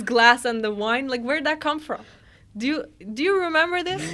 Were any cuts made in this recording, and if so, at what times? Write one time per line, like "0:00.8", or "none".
none